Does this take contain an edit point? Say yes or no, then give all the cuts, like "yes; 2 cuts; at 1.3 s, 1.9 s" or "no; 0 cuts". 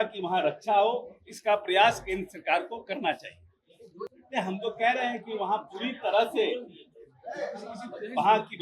yes; 1 cut; at 4.2 s